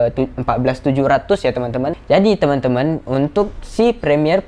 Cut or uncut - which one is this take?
cut